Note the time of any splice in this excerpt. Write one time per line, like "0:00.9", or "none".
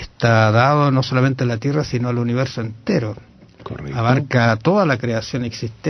0:01.2